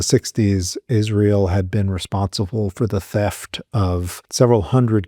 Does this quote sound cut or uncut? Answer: cut